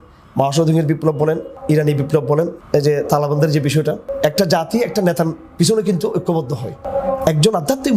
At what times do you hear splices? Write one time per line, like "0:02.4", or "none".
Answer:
0:01.5
0:02.6
0:04.1
0:06.8

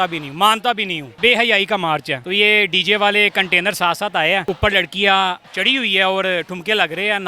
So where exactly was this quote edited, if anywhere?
0:01.1
0:02.2
0:04.5
0:05.5

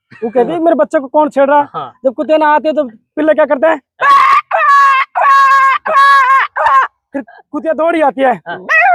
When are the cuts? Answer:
none

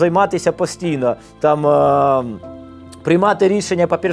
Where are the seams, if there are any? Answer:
none

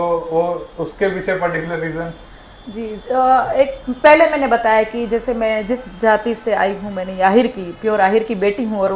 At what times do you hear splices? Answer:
none

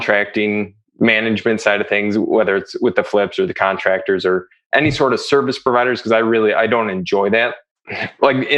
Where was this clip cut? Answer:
0:07.6

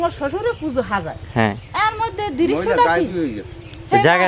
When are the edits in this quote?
none

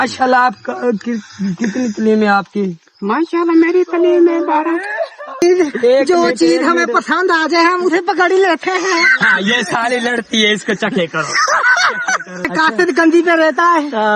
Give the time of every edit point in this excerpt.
0:05.4
0:12.5

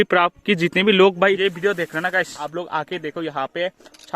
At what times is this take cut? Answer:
0:01.4
0:02.4

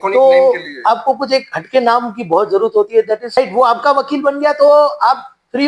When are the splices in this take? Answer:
0:03.4

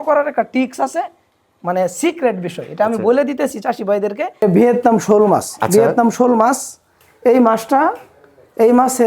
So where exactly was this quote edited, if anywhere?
0:04.3

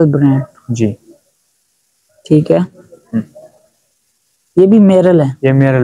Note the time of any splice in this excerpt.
none

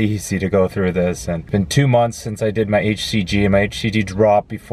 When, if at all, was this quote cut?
0:01.4

